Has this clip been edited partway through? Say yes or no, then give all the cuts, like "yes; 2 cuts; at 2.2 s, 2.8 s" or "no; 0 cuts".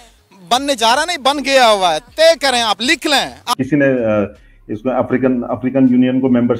yes; 1 cut; at 3.4 s